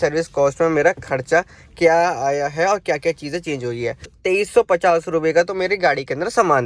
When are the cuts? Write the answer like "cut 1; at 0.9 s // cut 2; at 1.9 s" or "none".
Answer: cut 1; at 4.2 s